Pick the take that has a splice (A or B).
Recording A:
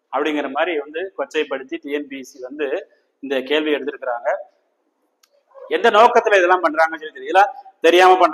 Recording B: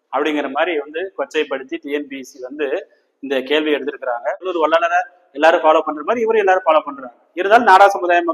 B